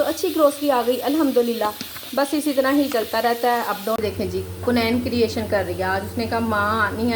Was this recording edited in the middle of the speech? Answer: yes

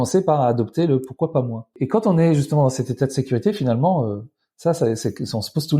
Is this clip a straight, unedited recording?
no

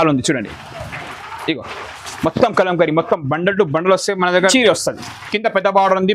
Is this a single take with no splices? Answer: no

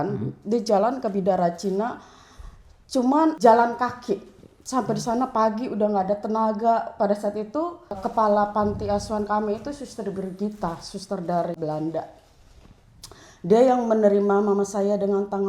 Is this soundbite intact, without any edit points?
no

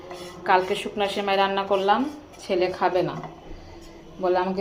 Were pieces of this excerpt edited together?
no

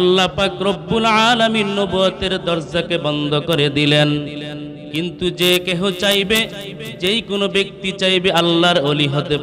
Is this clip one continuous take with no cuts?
yes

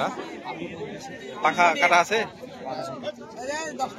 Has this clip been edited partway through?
no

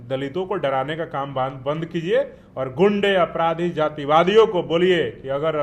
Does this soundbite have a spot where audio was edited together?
no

